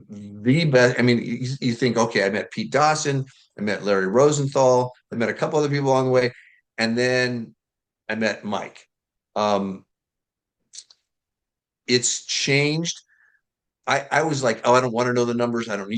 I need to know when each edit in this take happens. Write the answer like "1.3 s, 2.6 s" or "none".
none